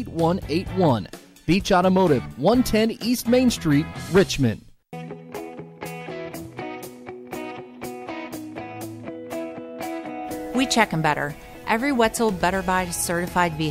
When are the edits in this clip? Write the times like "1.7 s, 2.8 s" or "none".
4.8 s